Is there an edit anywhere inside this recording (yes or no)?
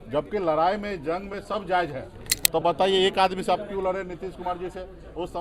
yes